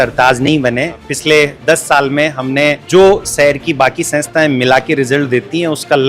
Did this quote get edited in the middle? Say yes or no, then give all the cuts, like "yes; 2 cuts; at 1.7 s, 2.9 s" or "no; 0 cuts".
yes; 2 cuts; at 1.1 s, 2.8 s